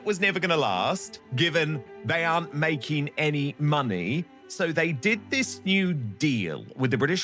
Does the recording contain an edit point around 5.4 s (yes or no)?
no